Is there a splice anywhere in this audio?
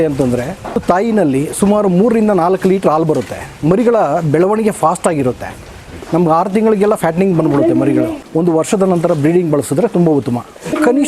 yes; 3 cuts; at 0.8 s, 3.5 s, 8.2 s

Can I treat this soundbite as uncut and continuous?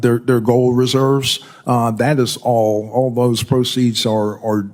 yes; 0 cuts

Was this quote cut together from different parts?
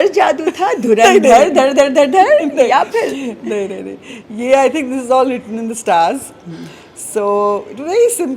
no; 0 cuts

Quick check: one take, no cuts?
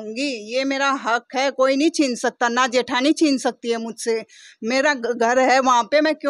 yes; 0 cuts

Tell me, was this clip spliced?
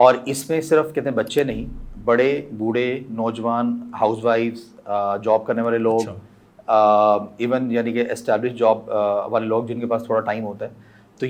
no; 0 cuts

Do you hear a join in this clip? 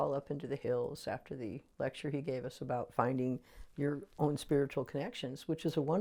no; 0 cuts

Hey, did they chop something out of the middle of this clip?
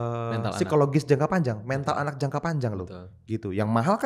no; 0 cuts

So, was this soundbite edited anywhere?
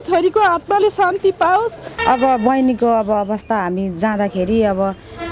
yes; 1 cut; at 1.9 s

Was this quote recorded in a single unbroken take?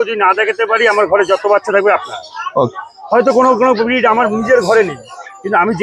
yes; 0 cuts

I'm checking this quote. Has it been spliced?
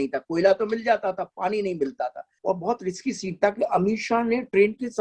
yes; 1 cut; at 2.3 s

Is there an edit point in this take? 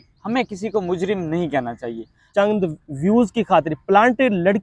yes; 1 cut; at 2.2 s

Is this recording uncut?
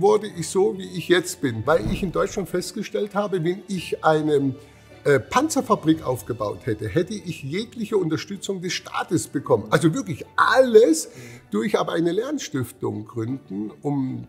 no; 1 cut; at 1.6 s

